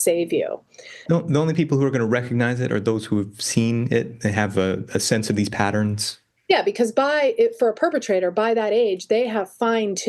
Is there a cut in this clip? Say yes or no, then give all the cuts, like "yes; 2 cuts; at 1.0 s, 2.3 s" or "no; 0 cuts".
yes; 1 cut; at 1.0 s